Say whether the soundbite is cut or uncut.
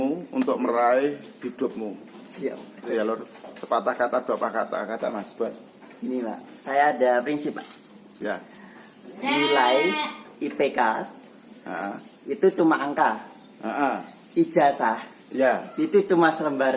cut